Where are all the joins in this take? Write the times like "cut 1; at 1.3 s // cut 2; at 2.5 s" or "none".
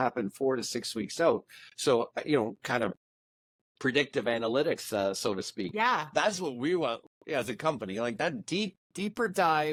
none

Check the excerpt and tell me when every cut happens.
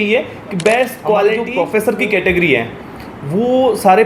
cut 1; at 1.4 s

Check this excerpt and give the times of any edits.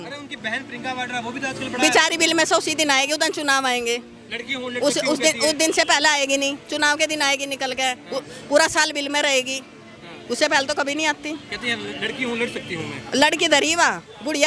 none

